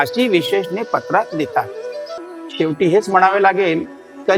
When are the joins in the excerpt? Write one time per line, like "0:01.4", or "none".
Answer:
0:02.2